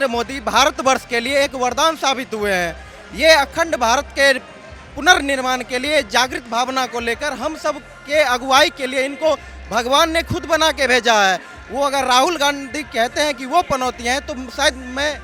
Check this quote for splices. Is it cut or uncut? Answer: uncut